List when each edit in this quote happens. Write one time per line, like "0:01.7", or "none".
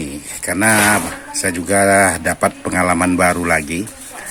none